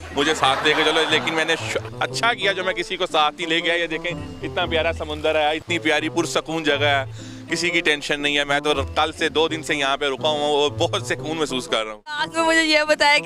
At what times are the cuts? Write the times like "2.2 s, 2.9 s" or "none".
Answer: 12.3 s

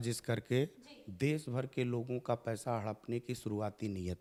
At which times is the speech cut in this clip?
none

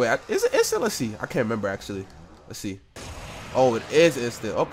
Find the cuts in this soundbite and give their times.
none

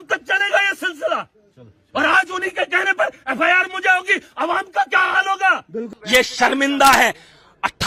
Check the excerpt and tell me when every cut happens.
5.8 s

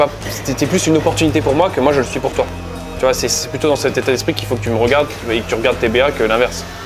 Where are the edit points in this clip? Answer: none

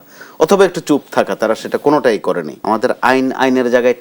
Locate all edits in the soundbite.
2.5 s

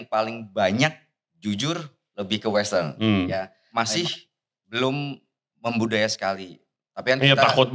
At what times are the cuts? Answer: 3.6 s

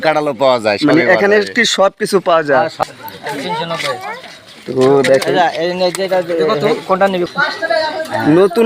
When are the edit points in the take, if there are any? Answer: 2.7 s, 7.3 s

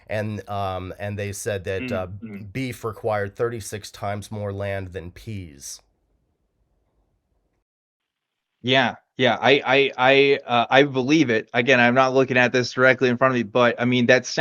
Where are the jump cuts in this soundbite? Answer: none

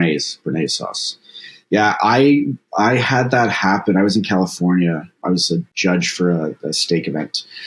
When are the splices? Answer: 5.3 s

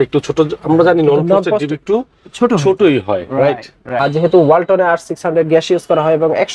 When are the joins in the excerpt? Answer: 3.8 s

